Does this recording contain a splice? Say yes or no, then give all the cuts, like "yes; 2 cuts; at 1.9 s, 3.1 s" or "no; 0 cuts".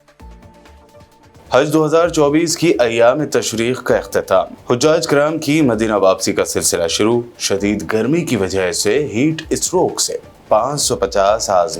yes; 1 cut; at 1.1 s